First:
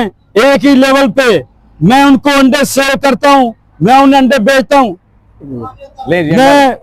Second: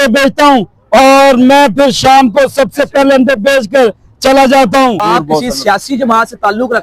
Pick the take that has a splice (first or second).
second